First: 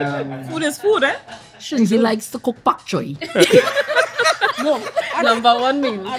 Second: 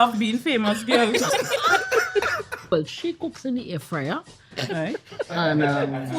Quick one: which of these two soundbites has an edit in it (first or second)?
second